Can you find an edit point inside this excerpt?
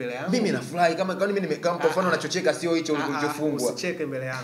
no; 0 cuts

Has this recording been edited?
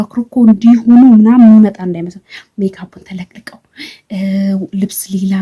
no; 0 cuts

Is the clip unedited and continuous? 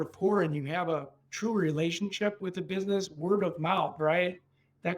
no; 1 cut; at 2.4 s

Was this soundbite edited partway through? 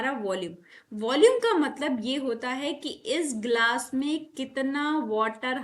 no; 0 cuts

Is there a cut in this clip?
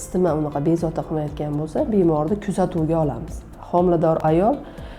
yes; 1 cut; at 3.5 s

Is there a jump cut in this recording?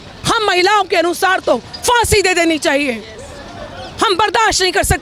no; 0 cuts

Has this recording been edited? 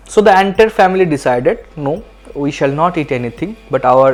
no; 0 cuts

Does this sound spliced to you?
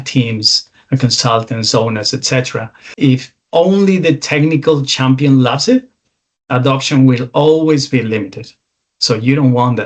yes; 1 cut; at 2.8 s

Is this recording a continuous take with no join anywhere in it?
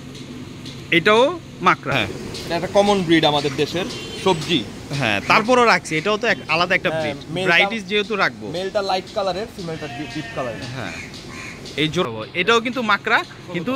no; 2 cuts; at 1.9 s, 12.0 s

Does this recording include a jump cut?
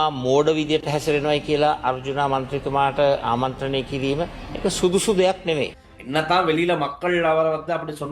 yes; 1 cut; at 5.8 s

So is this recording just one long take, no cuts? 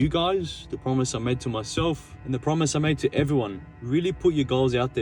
no; 1 cut; at 3.8 s

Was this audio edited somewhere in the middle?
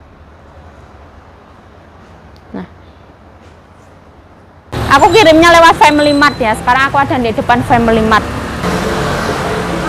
yes; 2 cuts; at 4.7 s, 8.6 s

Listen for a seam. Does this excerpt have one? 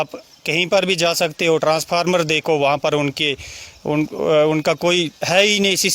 no; 0 cuts

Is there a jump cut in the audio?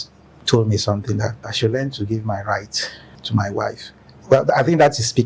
yes; 2 cuts; at 1.5 s, 3.1 s

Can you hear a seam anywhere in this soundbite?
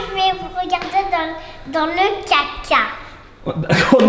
no; 0 cuts

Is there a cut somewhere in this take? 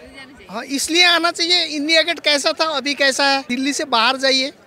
yes; 1 cut; at 3.5 s

